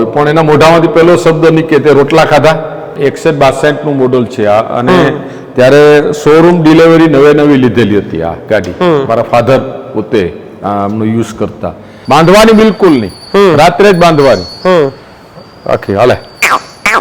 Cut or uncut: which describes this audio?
cut